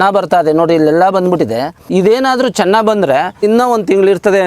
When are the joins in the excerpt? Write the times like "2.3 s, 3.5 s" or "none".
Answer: 1.8 s, 3.4 s